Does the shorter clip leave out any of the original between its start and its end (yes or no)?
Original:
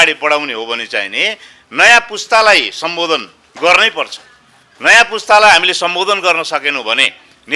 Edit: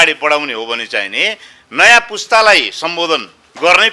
no